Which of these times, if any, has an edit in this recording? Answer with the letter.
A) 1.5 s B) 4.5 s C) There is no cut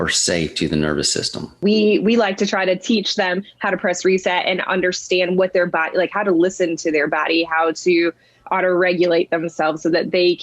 A